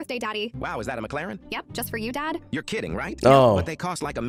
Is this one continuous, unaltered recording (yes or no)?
yes